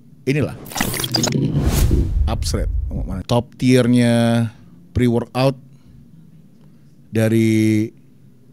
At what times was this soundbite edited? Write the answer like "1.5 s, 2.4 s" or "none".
3.2 s